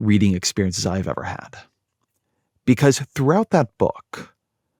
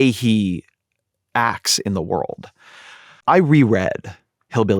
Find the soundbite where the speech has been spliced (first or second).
second